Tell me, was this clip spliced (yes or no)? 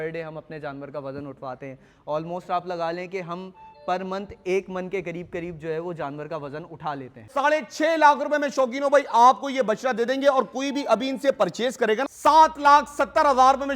yes